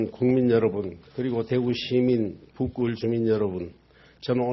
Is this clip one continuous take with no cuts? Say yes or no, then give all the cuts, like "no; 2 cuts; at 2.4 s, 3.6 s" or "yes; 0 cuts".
no; 1 cut; at 3.4 s